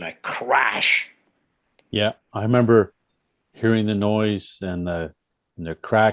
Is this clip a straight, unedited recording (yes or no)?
no